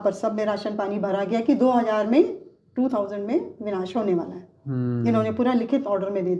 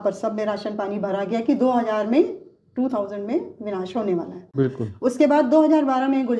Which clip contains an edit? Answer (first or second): second